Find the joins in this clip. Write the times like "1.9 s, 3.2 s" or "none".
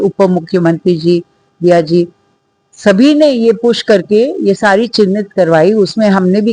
none